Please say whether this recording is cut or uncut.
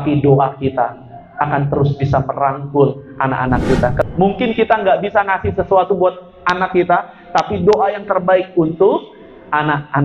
cut